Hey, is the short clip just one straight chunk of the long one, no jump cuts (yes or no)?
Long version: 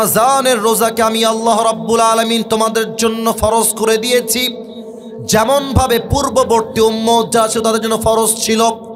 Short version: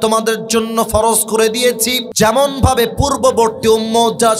no